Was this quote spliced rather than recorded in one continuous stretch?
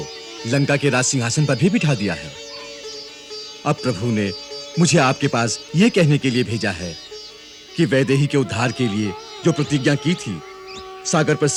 no; 0 cuts

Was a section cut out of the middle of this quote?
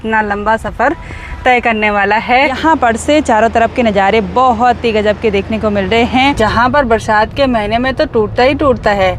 yes; 2 cuts; at 2.6 s, 6.4 s

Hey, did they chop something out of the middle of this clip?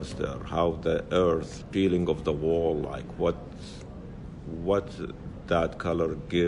no; 0 cuts

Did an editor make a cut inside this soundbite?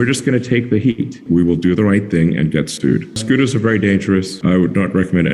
yes; 3 cuts; at 1.2 s, 3.2 s, 4.3 s

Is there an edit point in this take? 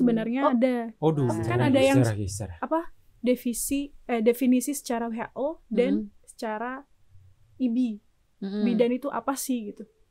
yes; 1 cut; at 1.5 s

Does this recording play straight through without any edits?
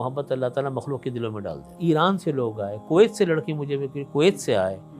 no; 1 cut; at 1.7 s

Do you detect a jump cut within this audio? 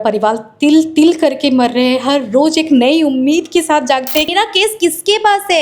yes; 1 cut; at 4.3 s

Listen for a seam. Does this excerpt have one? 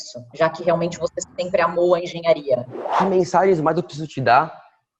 yes; 1 cut; at 3.0 s

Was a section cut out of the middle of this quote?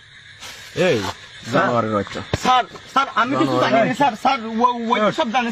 no; 0 cuts

